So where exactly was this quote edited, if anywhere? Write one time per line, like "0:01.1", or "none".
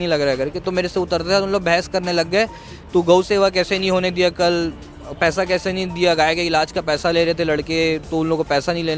none